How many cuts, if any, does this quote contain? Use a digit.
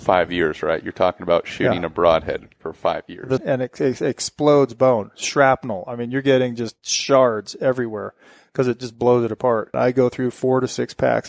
2